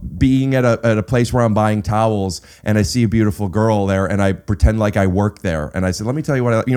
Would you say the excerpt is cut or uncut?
uncut